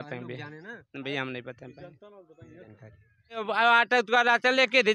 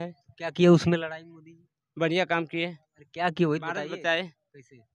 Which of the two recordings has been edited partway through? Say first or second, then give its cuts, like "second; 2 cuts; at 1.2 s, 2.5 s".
first; 1 cut; at 3.5 s